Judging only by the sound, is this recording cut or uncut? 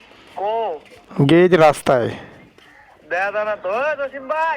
uncut